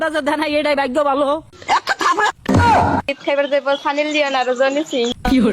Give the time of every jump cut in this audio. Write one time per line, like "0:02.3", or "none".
0:03.2